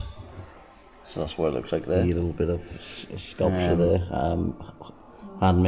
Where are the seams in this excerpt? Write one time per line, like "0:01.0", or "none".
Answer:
0:02.0